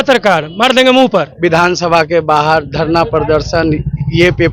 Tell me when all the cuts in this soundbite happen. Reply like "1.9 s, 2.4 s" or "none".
1.3 s